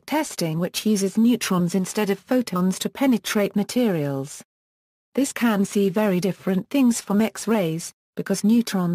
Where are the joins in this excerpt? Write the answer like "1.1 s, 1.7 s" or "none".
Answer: 4.0 s